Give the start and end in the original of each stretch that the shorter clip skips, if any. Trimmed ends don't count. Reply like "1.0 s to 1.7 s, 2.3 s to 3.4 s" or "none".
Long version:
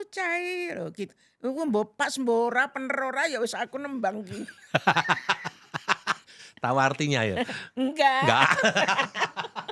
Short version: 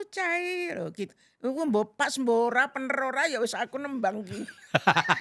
none